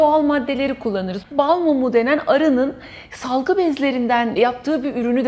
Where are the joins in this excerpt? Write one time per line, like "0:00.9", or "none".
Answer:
0:01.2
0:04.4